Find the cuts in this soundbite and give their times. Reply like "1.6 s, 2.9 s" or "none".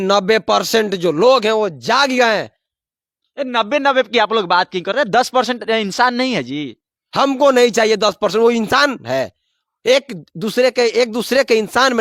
none